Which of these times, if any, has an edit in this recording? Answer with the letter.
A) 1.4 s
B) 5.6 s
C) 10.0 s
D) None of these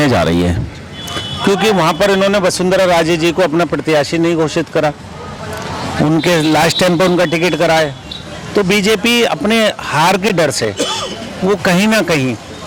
D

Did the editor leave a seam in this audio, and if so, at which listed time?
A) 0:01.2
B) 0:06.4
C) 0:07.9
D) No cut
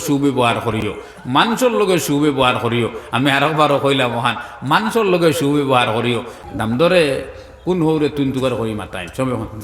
B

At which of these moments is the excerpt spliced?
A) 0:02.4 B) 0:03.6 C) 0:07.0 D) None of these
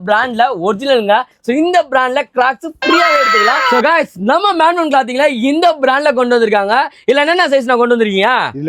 B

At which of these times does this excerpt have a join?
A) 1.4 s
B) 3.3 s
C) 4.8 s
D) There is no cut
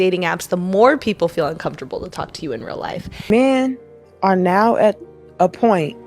B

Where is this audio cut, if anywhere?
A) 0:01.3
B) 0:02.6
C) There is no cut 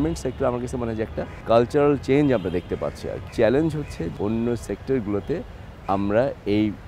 A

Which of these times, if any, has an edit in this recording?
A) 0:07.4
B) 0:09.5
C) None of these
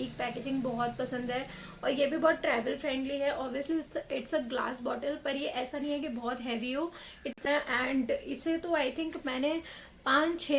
A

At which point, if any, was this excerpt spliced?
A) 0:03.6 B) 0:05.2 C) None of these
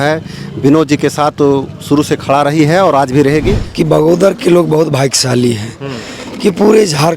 A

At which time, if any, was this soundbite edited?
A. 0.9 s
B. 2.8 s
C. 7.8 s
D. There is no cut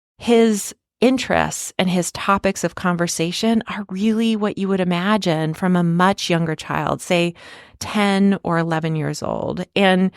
A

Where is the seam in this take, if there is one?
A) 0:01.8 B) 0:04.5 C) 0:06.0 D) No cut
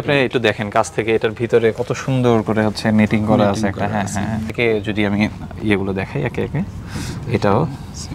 B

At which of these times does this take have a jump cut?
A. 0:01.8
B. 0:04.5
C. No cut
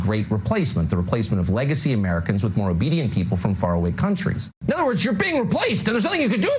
B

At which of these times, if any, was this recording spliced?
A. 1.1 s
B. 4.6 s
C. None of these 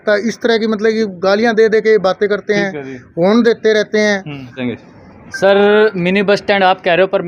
B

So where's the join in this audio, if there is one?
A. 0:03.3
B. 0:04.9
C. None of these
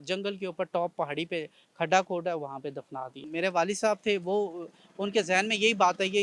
A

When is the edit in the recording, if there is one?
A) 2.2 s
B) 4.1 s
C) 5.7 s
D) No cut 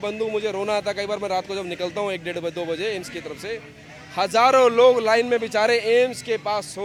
D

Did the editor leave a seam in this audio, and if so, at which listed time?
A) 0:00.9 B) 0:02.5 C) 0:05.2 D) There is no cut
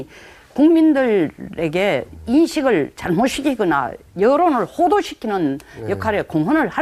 B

